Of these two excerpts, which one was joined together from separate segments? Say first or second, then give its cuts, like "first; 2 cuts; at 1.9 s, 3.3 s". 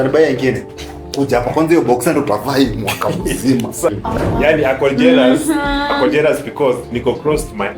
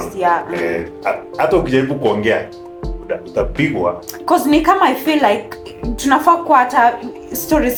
first; 1 cut; at 3.9 s